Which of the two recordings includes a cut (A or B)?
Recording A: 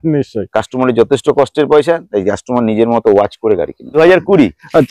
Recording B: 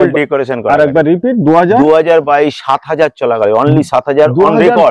A